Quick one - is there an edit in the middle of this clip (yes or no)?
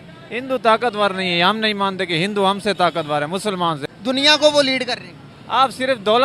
yes